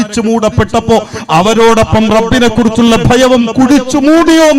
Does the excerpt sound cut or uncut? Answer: uncut